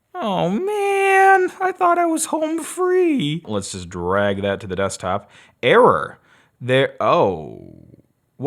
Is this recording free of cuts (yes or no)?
no